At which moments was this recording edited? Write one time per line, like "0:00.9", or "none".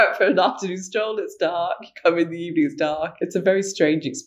0:03.1

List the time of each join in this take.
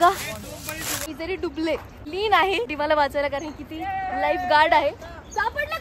0:01.0
0:01.9
0:02.7

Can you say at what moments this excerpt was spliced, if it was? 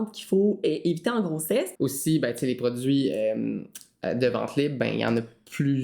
0:01.7

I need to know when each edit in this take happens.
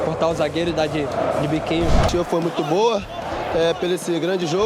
0:02.1

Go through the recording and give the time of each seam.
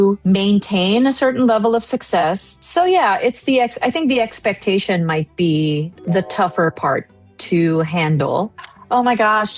0:08.6

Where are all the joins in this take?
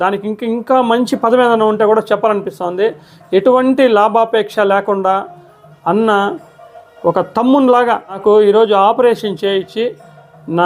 0:08.2

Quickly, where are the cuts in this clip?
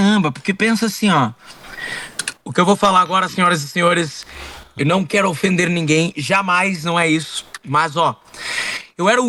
none

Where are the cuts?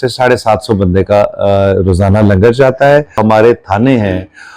0:03.2

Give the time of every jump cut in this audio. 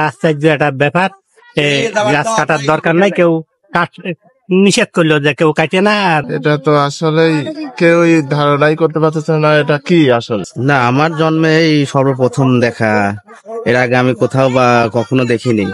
0:06.3
0:10.4

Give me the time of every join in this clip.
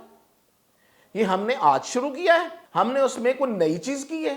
0:02.6

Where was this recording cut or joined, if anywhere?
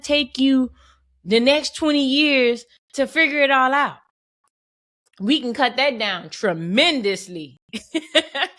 none

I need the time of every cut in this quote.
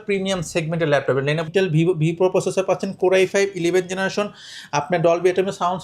0:01.4

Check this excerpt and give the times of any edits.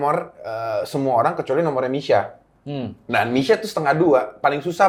none

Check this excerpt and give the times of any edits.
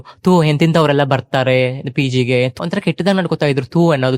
0:02.5

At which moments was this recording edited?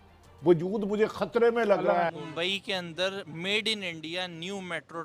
0:02.1

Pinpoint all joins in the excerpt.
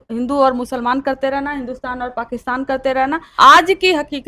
0:03.3

